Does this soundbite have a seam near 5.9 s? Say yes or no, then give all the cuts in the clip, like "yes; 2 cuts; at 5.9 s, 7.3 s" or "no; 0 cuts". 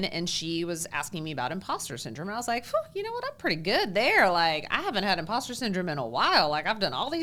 no; 0 cuts